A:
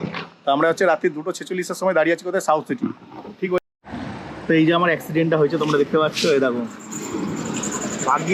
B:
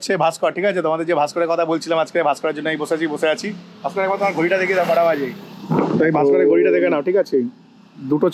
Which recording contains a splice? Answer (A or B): A